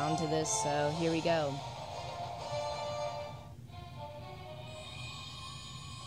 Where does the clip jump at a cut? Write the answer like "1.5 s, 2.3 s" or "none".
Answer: 4.9 s